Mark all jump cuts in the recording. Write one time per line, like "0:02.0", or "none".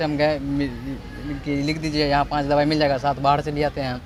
none